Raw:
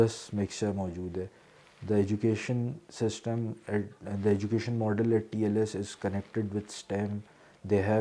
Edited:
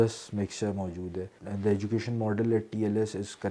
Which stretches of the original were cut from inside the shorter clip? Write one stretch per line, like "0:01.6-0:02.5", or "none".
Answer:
0:01.4-0:04.0